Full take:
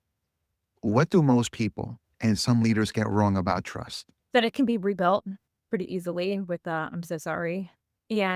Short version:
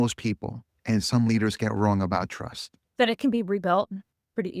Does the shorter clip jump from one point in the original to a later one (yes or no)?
no